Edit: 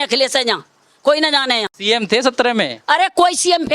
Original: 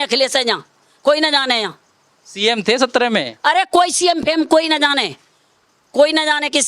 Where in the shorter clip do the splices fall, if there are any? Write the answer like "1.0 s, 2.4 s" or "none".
1.7 s